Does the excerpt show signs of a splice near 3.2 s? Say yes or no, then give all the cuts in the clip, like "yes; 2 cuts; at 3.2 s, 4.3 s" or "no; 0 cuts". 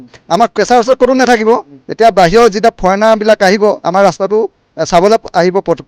no; 0 cuts